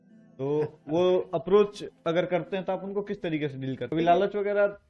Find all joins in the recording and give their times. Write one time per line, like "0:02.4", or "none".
0:03.9